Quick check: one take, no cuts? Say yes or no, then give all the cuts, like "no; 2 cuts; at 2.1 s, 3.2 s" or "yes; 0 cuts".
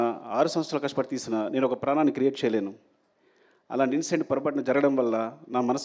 yes; 0 cuts